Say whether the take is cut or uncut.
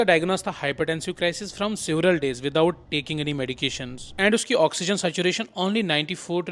uncut